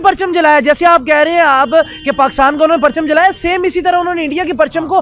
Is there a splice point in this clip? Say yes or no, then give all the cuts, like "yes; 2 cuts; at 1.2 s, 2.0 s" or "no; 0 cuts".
no; 0 cuts